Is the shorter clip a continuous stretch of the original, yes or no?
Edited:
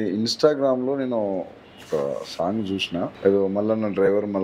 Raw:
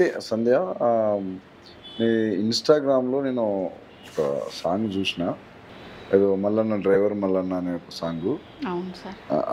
no